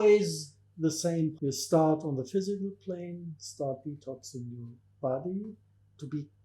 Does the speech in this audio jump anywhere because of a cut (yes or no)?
yes